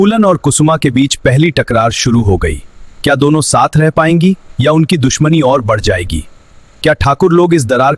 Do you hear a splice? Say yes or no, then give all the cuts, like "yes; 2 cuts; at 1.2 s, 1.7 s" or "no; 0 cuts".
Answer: no; 0 cuts